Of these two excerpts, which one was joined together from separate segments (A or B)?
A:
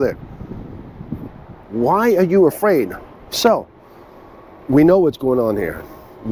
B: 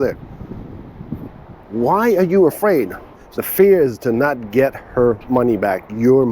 B